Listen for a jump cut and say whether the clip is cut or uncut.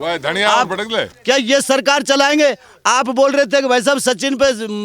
cut